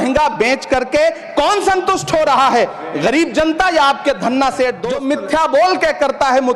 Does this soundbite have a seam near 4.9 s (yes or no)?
yes